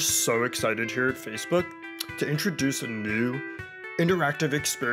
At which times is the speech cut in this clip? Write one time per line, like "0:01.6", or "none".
none